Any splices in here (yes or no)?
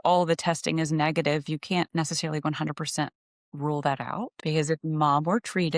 yes